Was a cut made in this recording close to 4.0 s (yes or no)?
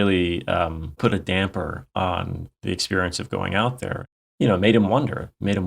yes